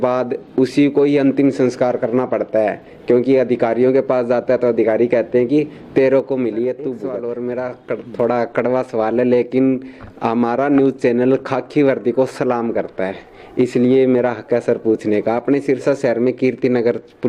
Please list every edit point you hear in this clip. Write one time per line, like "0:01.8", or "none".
0:07.1